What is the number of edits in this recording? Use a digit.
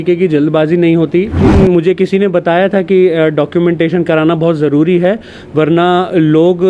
1